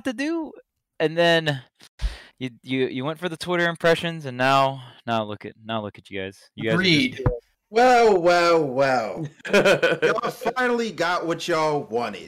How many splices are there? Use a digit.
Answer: 1